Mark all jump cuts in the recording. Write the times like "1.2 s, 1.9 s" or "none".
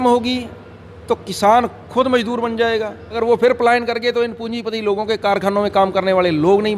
3.2 s